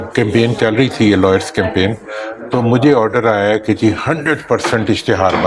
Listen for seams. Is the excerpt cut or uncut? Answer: uncut